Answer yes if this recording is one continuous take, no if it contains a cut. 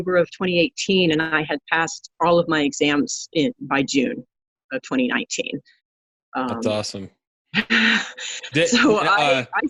yes